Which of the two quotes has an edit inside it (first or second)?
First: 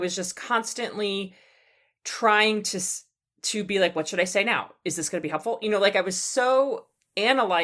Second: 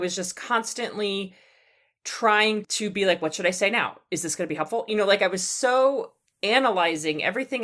second